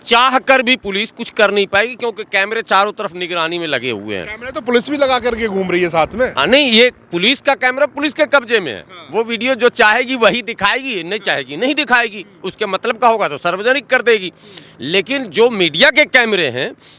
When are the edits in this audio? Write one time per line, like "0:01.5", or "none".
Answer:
none